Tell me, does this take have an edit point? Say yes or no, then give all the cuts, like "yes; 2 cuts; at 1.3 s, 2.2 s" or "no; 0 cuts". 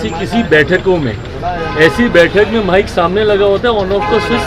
no; 0 cuts